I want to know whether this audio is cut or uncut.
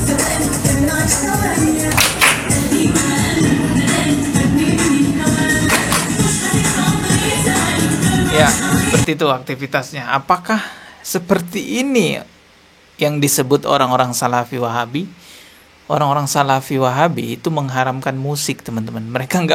uncut